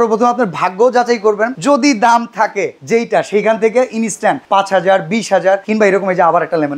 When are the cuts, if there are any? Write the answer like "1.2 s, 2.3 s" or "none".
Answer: 1.6 s, 2.7 s, 4.4 s, 5.7 s